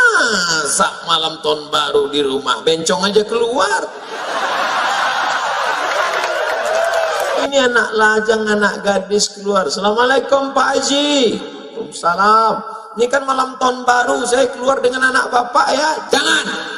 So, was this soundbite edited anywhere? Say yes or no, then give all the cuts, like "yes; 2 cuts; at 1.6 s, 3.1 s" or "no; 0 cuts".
yes; 1 cut; at 7.4 s